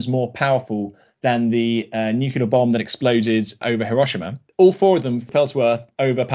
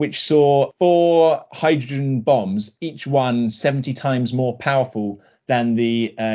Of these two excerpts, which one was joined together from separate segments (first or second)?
first